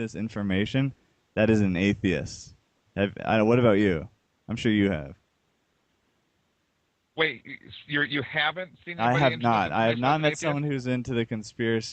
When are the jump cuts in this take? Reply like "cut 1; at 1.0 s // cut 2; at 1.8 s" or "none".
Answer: cut 1; at 8.8 s